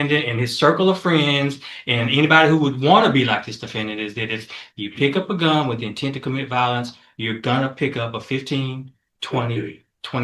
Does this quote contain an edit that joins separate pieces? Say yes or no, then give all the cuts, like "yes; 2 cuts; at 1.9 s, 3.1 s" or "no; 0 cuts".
no; 0 cuts